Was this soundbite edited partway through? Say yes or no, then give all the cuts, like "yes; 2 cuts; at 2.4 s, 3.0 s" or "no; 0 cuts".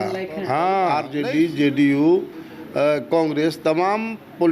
yes; 1 cut; at 0.9 s